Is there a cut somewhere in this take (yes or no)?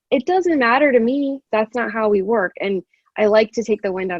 yes